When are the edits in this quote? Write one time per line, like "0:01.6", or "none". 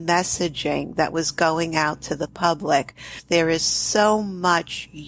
0:03.2